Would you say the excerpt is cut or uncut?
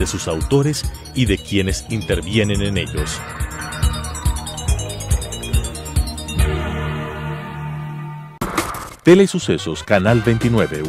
uncut